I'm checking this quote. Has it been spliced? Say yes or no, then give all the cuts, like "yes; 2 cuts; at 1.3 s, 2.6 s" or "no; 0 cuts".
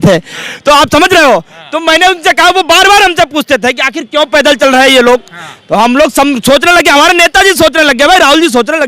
no; 0 cuts